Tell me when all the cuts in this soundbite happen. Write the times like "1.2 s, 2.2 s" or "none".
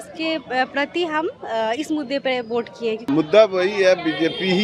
3.0 s